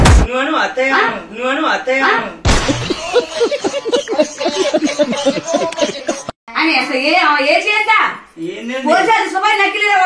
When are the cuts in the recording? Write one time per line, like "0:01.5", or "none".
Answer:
0:06.4